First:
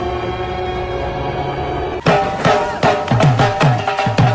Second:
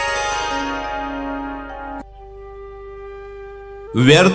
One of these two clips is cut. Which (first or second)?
first